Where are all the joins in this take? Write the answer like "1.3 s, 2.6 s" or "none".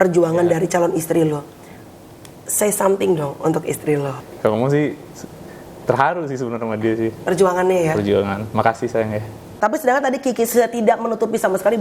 4.2 s, 9.5 s